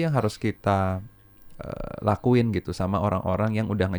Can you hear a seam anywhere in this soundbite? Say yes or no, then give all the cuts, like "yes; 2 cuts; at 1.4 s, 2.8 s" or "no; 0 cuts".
no; 0 cuts